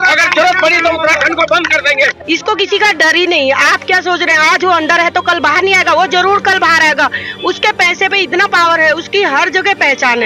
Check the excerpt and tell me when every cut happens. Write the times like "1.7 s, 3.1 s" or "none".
2.2 s